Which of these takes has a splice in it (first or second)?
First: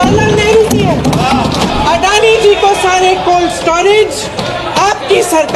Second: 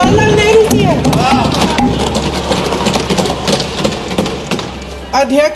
first